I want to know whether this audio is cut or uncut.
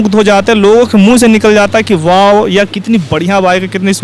uncut